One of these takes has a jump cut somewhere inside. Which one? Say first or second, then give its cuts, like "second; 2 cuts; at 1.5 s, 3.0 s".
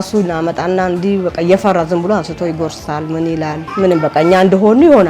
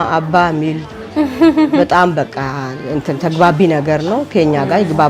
first; 1 cut; at 3.6 s